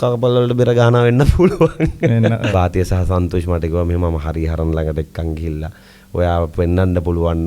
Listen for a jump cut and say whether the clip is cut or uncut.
cut